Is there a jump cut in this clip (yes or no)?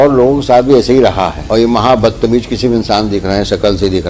yes